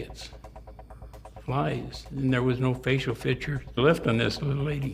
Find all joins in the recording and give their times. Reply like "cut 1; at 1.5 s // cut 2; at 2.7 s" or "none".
cut 1; at 3.8 s